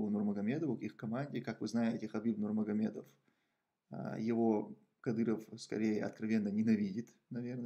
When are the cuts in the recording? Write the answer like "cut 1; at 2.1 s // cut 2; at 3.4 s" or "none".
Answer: none